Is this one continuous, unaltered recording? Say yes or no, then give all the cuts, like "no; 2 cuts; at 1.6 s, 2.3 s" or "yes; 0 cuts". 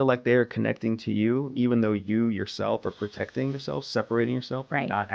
yes; 0 cuts